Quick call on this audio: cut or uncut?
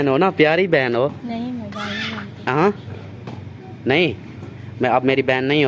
uncut